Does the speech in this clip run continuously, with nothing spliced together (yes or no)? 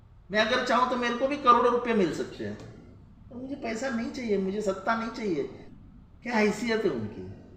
no